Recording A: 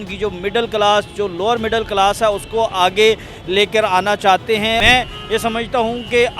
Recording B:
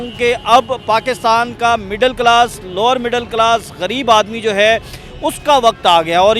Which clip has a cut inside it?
A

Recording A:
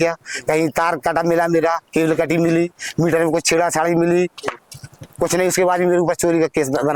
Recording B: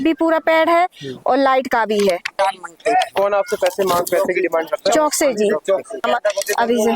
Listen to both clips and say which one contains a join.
B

